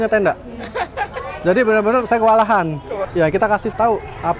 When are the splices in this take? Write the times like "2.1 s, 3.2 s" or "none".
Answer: 3.0 s